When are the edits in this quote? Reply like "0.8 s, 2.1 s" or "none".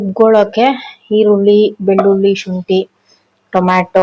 none